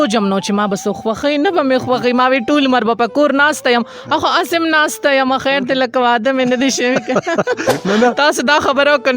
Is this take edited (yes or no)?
yes